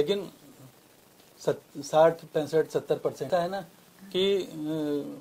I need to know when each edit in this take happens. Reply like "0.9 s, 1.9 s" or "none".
3.3 s